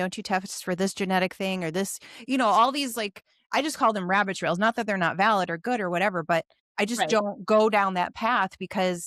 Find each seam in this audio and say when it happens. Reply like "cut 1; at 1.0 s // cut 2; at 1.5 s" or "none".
cut 1; at 6.6 s

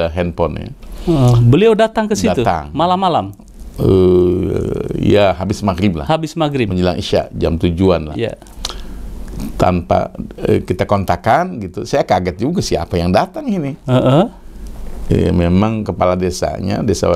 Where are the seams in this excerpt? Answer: none

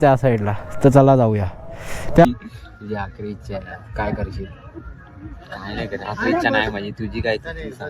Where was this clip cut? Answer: cut 1; at 2.3 s

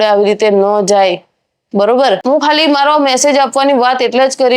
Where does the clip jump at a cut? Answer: cut 1; at 2.2 s

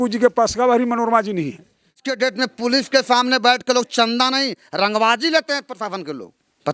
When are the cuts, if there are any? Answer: cut 1; at 2.0 s

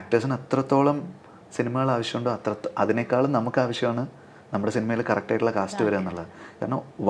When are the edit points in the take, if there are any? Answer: none

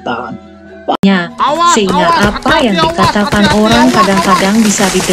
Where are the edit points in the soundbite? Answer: cut 1; at 1.0 s

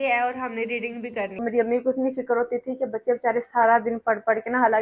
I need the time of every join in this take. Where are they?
cut 1; at 1.4 s

